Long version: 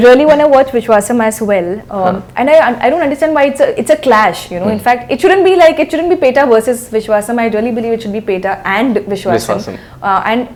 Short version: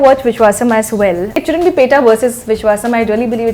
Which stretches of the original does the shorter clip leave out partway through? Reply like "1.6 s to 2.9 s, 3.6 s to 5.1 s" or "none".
1.9 s to 5.8 s